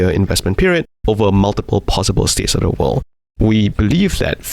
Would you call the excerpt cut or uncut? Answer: cut